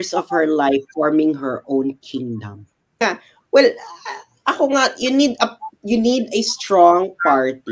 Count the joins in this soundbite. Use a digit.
1